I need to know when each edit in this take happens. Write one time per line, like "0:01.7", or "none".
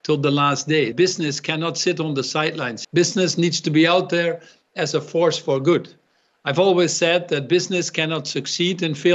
0:00.9
0:02.7